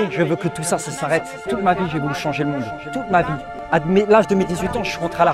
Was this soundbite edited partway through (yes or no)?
no